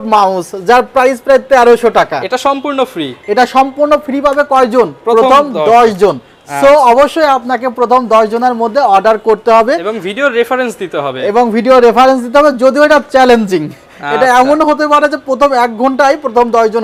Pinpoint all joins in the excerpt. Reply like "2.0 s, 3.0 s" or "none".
none